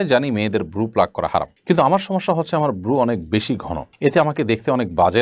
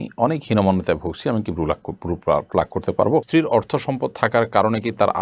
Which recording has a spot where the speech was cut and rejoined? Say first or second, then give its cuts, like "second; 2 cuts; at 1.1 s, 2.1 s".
second; 1 cut; at 3.3 s